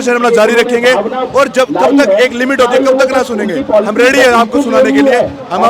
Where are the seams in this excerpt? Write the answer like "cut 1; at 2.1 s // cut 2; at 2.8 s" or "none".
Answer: none